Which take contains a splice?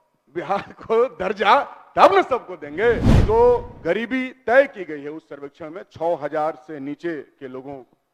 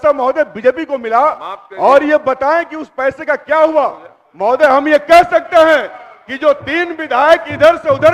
first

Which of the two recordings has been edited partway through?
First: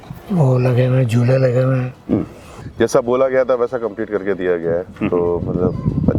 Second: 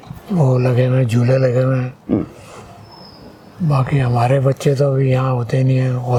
first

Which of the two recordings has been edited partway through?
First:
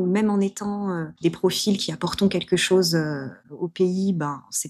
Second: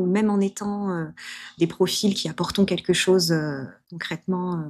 first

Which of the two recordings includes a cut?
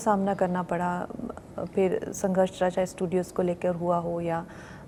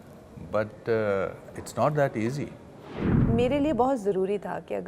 second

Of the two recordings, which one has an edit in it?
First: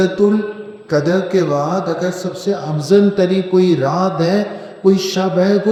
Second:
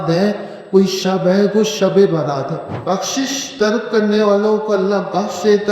second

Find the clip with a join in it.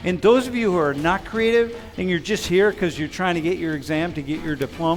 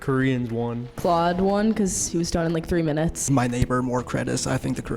second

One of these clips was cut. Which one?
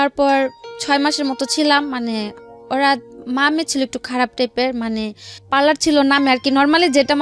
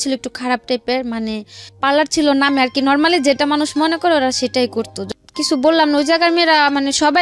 second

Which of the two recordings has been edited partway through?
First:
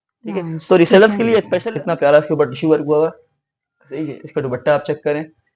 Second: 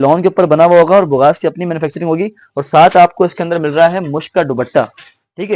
first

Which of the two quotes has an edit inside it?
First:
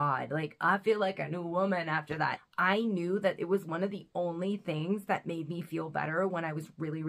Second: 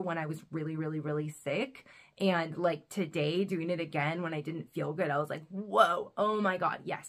first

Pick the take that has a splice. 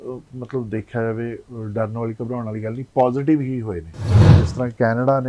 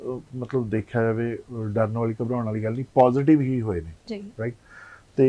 first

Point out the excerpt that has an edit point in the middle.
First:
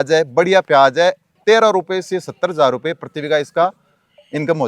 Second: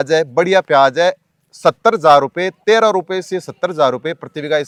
first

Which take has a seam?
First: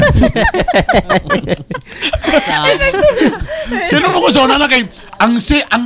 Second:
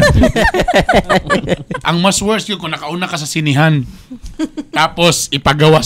second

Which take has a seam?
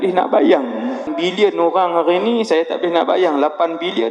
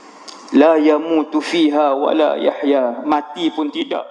first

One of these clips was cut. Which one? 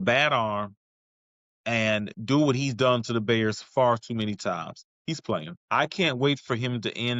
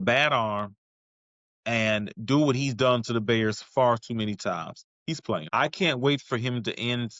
second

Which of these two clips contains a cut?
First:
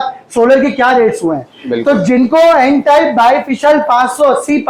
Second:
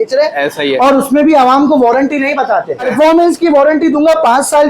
second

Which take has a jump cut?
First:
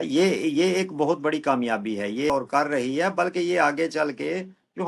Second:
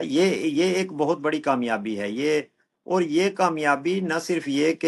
first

